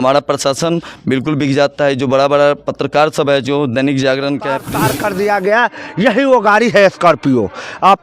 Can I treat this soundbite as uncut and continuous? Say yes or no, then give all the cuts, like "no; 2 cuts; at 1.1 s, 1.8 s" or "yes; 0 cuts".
no; 1 cut; at 4.7 s